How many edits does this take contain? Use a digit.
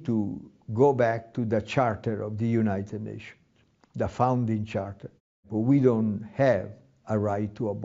1